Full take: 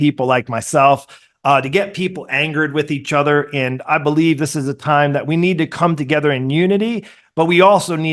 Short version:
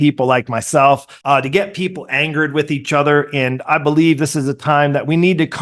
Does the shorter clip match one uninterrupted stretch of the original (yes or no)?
no